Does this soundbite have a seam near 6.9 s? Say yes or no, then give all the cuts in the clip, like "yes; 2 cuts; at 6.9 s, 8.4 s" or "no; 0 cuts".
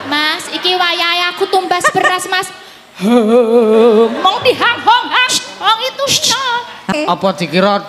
yes; 1 cut; at 6.9 s